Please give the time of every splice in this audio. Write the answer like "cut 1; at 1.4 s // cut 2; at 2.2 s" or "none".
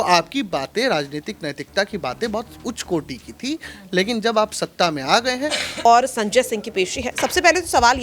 cut 1; at 5.9 s